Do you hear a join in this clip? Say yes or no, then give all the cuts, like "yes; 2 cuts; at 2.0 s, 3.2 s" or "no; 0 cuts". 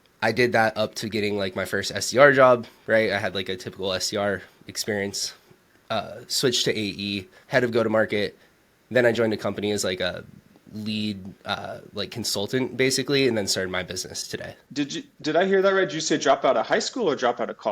no; 0 cuts